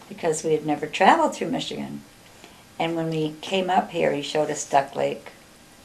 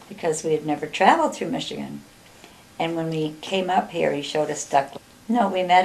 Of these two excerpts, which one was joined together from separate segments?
first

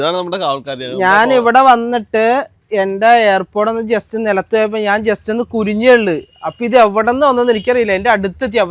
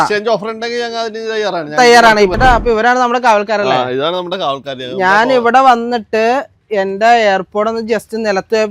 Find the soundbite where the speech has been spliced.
second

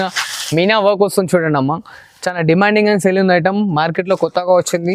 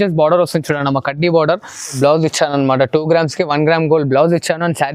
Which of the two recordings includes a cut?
second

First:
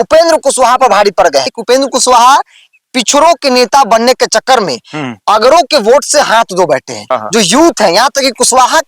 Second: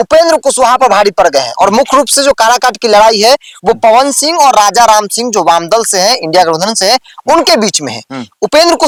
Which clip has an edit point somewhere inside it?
first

